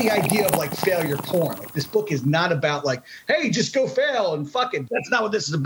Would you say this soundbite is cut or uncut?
cut